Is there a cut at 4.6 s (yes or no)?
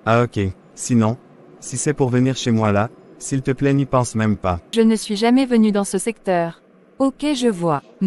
yes